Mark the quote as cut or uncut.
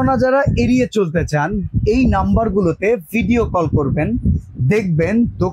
uncut